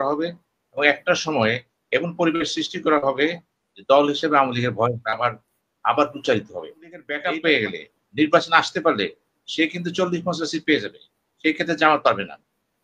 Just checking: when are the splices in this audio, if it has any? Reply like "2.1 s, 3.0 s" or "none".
7.2 s